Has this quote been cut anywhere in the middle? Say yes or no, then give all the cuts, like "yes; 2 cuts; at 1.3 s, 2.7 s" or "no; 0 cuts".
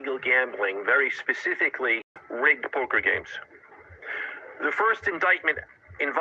yes; 1 cut; at 2.1 s